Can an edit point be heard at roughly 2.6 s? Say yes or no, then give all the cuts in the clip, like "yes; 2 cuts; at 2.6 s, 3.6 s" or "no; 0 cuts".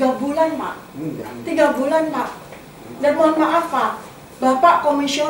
no; 0 cuts